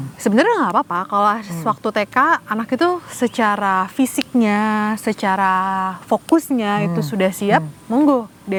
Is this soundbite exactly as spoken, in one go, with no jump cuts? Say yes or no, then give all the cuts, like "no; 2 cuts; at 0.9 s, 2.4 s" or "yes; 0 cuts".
yes; 0 cuts